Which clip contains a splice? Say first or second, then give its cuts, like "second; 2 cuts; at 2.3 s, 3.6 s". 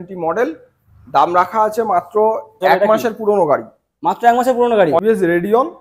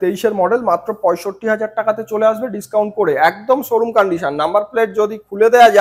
first; 2 cuts; at 2.6 s, 5.0 s